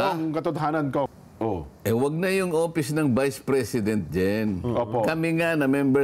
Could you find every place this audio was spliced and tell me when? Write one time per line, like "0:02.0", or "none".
0:01.2